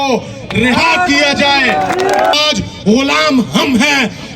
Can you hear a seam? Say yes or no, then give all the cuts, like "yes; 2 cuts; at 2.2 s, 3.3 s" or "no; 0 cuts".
yes; 1 cut; at 2.3 s